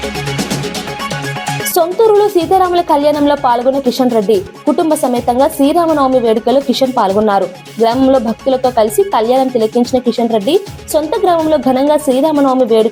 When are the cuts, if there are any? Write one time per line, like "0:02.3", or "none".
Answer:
none